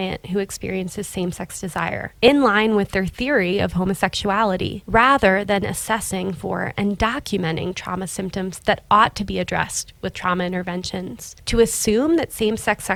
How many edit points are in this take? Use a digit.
0